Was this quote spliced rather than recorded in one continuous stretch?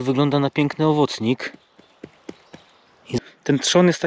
yes; 1 cut; at 3.1 s

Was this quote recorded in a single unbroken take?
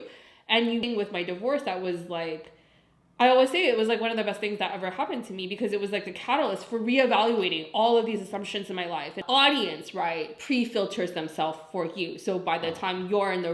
no; 1 cut; at 9.2 s

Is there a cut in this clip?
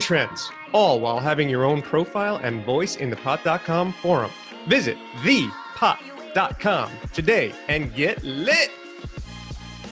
yes; 1 cut; at 9.0 s

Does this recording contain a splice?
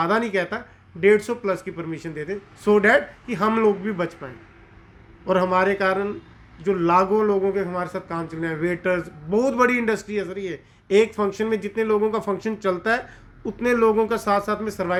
no; 0 cuts

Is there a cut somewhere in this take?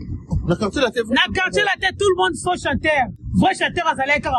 no; 0 cuts

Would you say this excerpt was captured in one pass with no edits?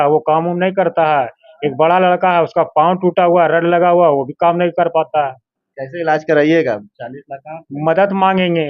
yes; 0 cuts

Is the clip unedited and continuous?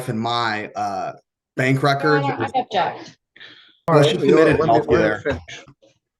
no; 1 cut; at 3.9 s

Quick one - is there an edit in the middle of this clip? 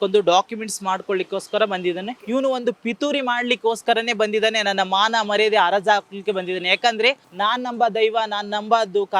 yes; 1 cut; at 7.3 s

